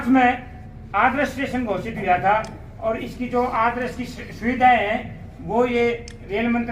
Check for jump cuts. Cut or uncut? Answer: uncut